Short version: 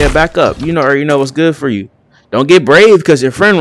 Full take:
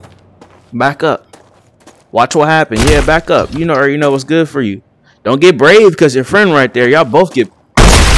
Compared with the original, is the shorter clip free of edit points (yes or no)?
yes